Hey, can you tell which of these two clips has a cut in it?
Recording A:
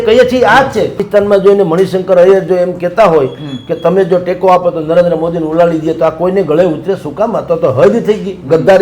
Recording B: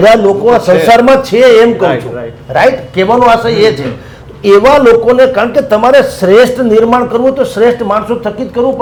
A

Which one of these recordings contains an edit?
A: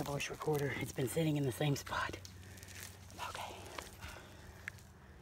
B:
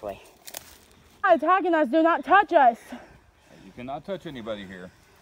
B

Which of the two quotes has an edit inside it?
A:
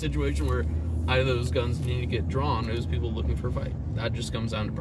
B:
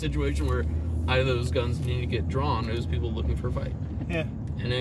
A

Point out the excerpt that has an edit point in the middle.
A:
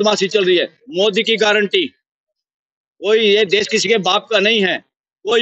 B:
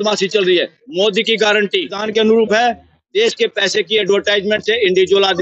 B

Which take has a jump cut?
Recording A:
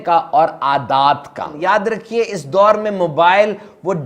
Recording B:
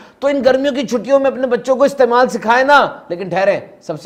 A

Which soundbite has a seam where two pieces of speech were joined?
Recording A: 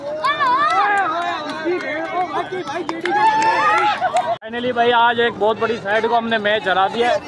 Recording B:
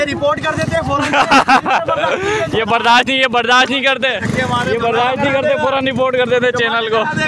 B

